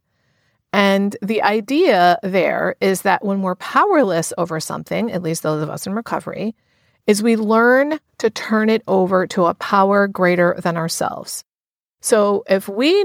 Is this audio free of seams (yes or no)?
yes